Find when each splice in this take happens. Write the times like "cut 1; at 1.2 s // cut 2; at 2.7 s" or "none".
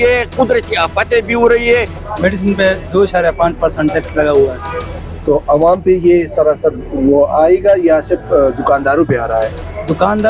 cut 1; at 2.0 s